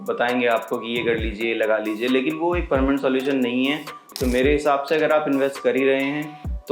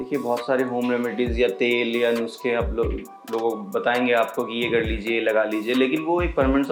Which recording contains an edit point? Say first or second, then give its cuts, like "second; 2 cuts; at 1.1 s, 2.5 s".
first; 1 cut; at 4.0 s